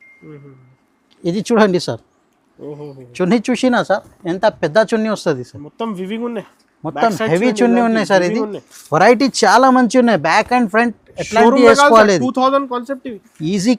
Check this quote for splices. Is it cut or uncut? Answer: uncut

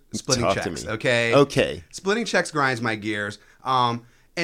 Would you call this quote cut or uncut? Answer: uncut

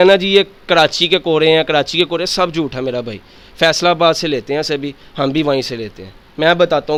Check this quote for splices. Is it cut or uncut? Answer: uncut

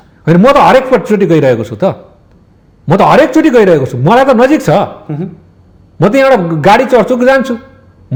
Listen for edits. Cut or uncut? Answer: uncut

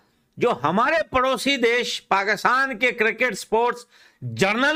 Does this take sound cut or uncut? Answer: uncut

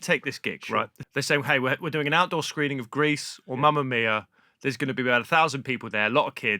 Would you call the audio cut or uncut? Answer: cut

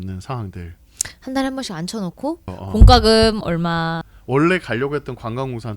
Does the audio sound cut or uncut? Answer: cut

